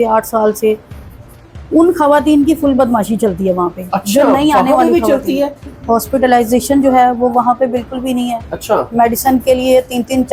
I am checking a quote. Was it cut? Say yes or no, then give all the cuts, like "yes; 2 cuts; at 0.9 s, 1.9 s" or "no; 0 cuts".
yes; 1 cut; at 5.7 s